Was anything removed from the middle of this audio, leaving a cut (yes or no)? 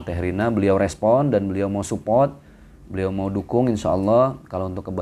no